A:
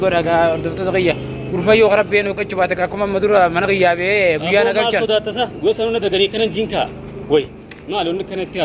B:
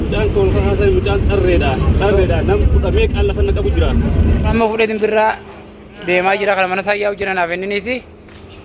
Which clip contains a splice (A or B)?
B